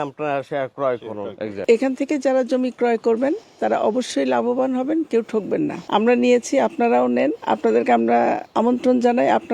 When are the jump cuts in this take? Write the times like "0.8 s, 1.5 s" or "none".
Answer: 1.6 s, 5.8 s, 7.4 s, 8.4 s